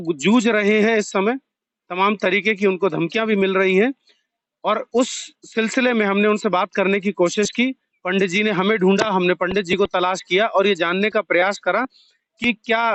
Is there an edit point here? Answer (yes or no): no